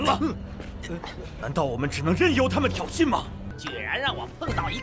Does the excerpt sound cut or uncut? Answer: cut